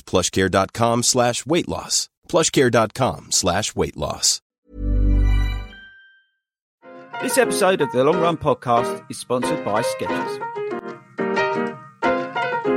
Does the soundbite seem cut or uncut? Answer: cut